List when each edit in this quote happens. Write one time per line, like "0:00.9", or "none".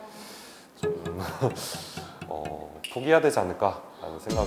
none